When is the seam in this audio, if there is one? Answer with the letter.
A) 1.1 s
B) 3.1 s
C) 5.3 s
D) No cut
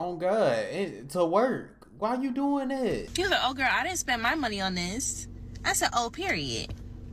B